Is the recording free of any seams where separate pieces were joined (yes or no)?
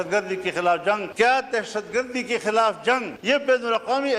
no